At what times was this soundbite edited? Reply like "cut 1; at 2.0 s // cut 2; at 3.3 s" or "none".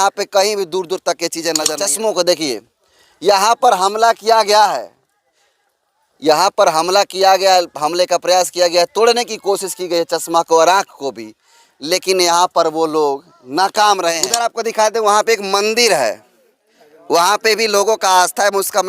cut 1; at 1.7 s // cut 2; at 14.4 s